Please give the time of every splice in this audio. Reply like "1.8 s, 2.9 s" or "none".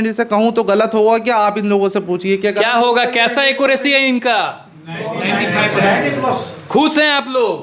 none